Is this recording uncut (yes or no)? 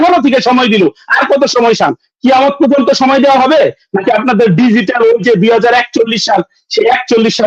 yes